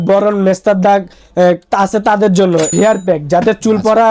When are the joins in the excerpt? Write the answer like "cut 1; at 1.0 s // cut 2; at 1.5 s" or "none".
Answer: cut 1; at 2.7 s